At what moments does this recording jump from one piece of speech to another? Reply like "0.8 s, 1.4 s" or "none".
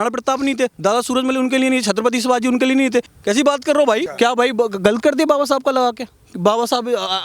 4.1 s